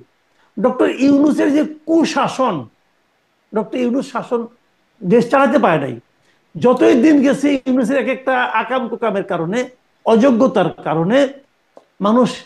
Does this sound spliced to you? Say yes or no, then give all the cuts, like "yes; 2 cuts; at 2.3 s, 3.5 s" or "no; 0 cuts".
no; 0 cuts